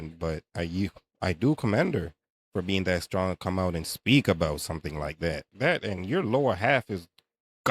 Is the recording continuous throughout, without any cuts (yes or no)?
no